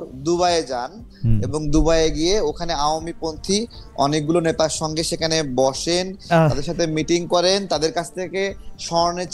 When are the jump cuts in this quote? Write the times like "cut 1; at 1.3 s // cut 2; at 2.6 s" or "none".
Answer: none